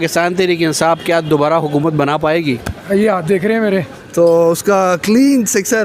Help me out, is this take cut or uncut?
cut